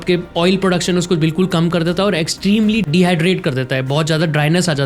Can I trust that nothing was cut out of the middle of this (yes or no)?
no